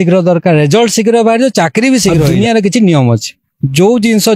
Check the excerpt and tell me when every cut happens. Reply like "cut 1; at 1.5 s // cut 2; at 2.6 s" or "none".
cut 1; at 2.3 s